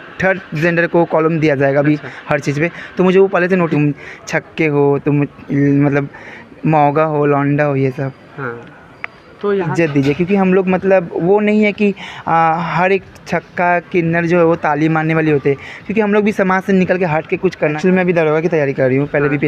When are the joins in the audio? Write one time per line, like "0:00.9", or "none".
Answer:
0:03.7
0:09.7
0:17.8